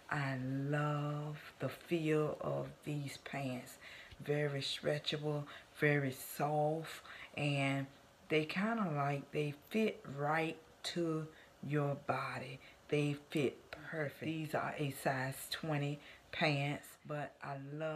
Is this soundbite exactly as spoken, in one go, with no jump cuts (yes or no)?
no